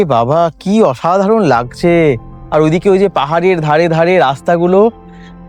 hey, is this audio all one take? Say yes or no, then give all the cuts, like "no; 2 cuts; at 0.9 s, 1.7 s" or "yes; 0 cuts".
yes; 0 cuts